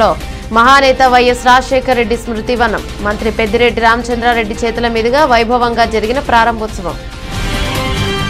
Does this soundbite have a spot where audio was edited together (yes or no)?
yes